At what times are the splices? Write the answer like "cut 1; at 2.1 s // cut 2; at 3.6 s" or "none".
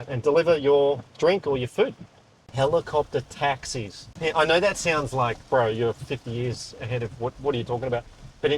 cut 1; at 2.5 s // cut 2; at 4.2 s